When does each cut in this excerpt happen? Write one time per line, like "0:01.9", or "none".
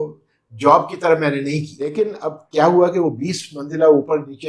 0:01.9